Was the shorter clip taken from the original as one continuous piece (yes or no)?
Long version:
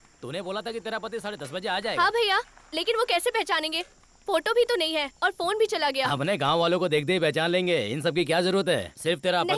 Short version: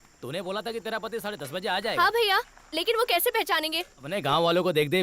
no